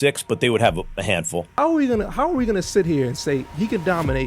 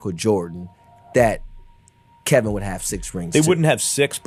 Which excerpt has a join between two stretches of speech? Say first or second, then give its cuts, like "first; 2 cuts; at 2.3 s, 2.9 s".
first; 1 cut; at 1.5 s